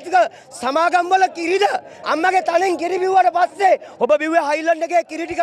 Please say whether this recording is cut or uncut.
cut